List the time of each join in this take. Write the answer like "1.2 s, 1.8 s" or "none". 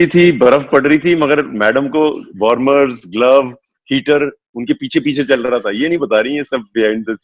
none